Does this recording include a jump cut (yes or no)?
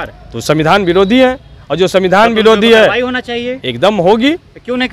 no